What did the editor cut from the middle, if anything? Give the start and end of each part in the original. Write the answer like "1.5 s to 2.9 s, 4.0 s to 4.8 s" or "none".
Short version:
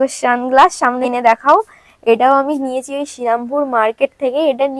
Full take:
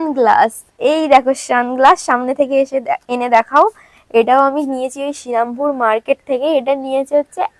2.3 s to 3.1 s